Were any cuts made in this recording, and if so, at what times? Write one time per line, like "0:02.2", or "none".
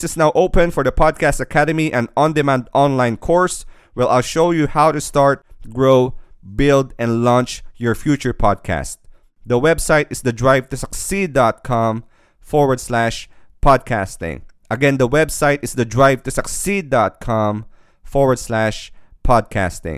none

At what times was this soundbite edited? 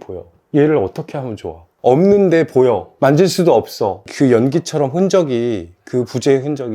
0:04.0

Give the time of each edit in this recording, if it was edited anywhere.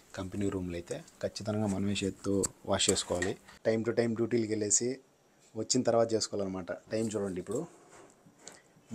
0:03.5

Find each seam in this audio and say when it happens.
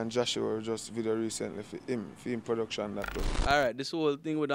0:03.3

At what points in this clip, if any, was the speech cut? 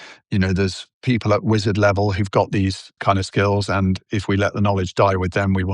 0:00.8
0:03.0
0:04.0

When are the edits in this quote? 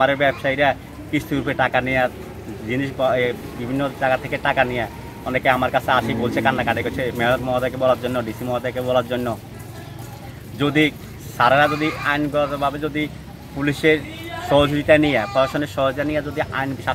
none

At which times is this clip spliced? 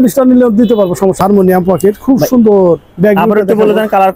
0:01.2

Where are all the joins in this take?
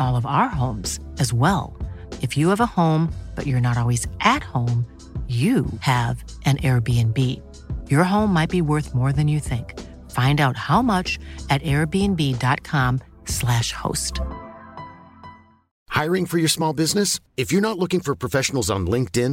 0:15.7

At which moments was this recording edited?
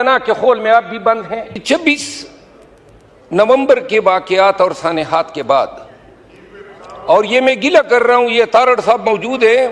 0:01.5

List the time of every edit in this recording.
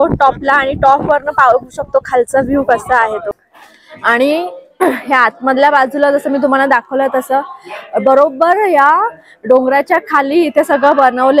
0:03.3

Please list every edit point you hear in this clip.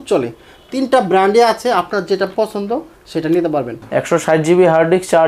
0:03.8

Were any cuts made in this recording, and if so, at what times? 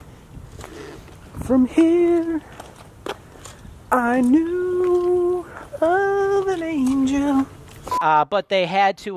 0:08.0

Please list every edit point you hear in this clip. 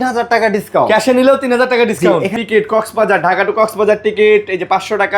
0:02.3

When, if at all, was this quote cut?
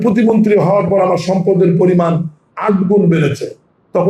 none

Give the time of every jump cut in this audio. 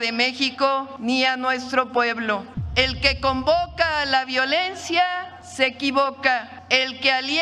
0:00.9
0:02.6
0:05.4
0:06.6

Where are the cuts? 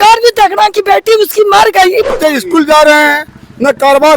0:02.1

